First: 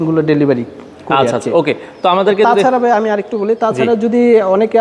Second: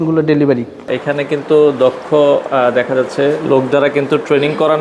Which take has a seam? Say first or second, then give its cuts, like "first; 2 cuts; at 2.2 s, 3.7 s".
second; 1 cut; at 0.9 s